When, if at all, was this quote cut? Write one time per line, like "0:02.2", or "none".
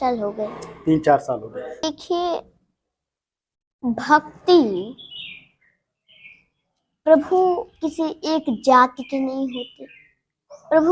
0:01.8